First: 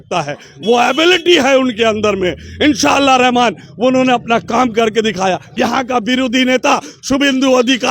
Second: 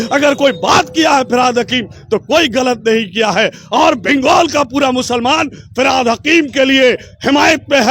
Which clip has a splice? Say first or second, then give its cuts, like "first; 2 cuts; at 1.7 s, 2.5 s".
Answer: first; 1 cut; at 5.5 s